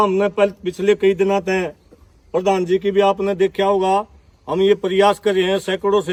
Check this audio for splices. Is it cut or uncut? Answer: uncut